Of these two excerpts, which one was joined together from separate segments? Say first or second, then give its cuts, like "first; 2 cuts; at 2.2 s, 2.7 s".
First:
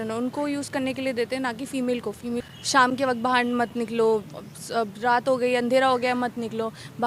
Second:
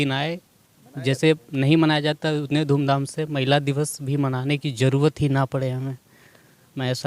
first; 1 cut; at 2.5 s